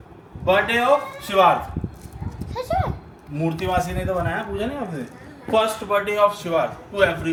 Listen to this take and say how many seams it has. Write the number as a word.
zero